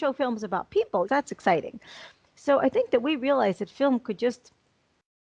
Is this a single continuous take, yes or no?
no